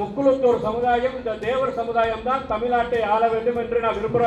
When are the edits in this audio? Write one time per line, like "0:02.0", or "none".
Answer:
none